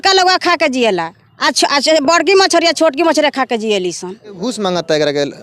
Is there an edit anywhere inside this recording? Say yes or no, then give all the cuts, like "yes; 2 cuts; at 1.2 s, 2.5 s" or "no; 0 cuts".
no; 0 cuts